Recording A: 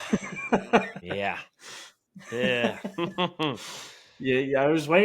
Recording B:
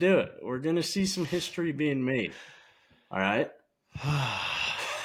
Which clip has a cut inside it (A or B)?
A